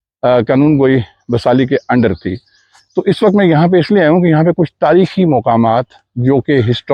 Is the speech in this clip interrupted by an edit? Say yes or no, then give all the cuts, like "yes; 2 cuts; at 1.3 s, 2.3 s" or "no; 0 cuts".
no; 0 cuts